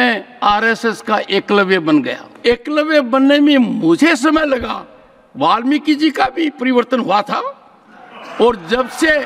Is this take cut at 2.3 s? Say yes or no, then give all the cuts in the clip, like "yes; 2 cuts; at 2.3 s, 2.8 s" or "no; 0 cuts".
yes; 1 cut; at 2.3 s